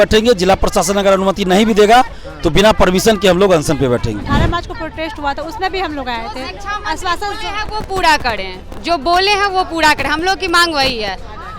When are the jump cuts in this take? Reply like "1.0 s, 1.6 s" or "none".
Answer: 4.2 s